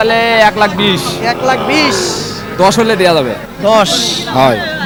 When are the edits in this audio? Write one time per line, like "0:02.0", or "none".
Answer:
none